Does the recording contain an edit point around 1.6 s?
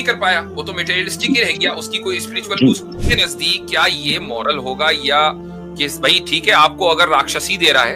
no; 1 cut; at 3.0 s

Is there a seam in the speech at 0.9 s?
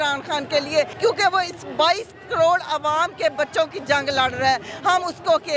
yes; 1 cut; at 0.9 s

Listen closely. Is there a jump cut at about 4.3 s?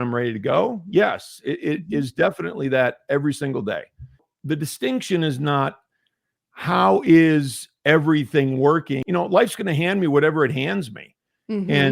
yes; 2 cuts; at 4.3 s, 8.9 s

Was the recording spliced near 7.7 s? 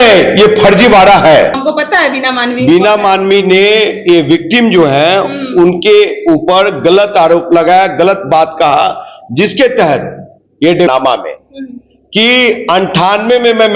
no; 2 cuts; at 1.6 s, 10.9 s

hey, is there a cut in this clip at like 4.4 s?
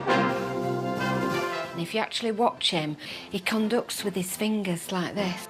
yes; 1 cut; at 4.4 s

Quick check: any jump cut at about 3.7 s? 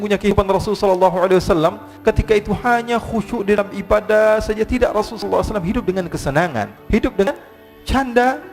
no; 1 cut; at 6.8 s

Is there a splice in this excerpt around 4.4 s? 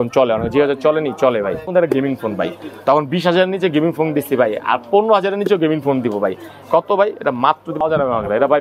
no; 2 cuts; at 1.7 s, 7.8 s

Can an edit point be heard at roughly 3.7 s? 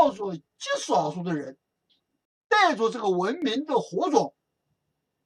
no; 1 cut; at 2.5 s

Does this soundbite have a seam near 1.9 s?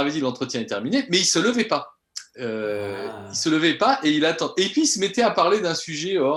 no; 0 cuts

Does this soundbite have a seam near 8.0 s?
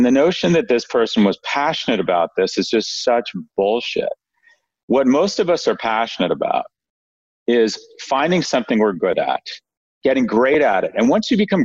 no; 0 cuts

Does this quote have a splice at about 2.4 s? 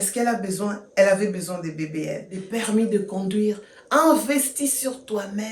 yes; 1 cut; at 2.4 s

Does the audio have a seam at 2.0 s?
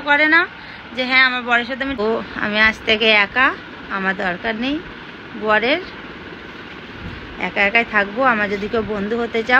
yes; 1 cut; at 2.0 s

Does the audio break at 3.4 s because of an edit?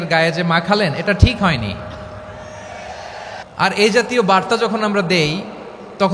yes; 1 cut; at 3.4 s

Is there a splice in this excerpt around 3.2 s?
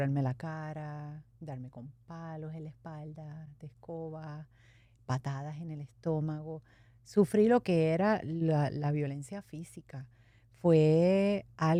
no; 0 cuts

